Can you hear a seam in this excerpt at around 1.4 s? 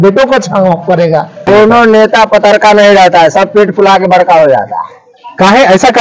yes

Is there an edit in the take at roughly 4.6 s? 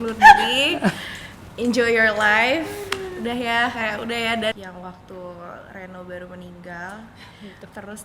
yes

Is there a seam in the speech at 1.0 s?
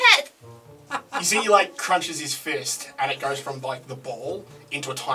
yes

